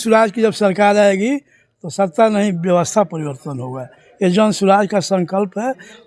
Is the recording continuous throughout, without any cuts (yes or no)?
yes